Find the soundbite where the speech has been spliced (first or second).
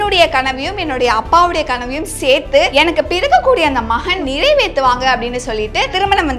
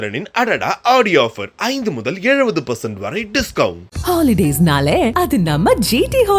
first